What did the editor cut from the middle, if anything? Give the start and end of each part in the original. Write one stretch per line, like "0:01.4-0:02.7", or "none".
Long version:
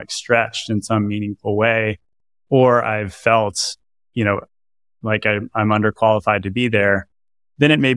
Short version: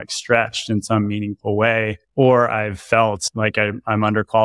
0:02.0-0:02.3
0:03.6-0:04.9